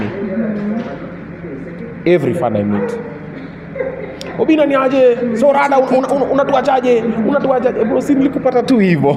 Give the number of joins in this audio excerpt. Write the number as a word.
zero